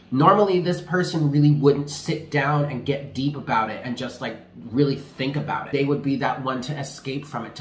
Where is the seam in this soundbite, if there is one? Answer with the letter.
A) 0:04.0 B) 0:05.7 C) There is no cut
B